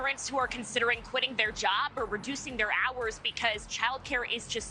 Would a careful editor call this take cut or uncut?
uncut